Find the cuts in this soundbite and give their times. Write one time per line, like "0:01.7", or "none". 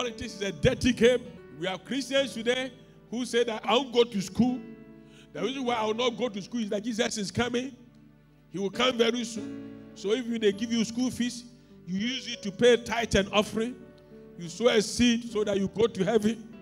0:01.4
0:03.6